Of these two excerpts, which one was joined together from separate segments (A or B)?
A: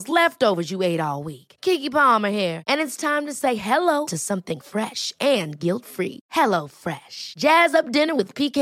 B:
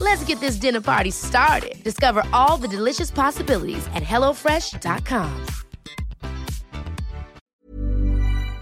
B